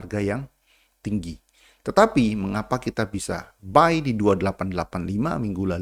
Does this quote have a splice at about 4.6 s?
no; 0 cuts

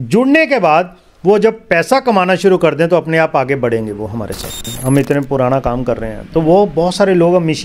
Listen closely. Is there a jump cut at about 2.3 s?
no; 1 cut; at 4.7 s

